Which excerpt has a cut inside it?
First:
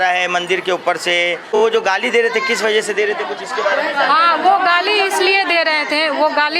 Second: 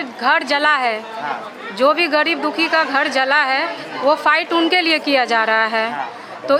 first; 1 cut; at 1.4 s

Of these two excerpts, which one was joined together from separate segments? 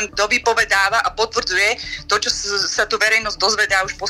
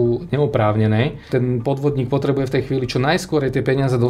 second; 1 cut; at 1.2 s

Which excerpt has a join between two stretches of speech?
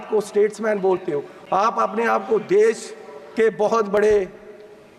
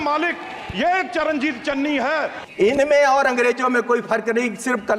second; 1 cut; at 2.4 s

